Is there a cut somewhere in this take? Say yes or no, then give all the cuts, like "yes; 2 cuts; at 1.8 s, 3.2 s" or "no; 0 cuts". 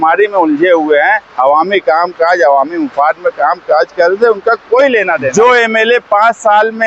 yes; 1 cut; at 5.3 s